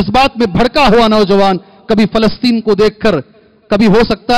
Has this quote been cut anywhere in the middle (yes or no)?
no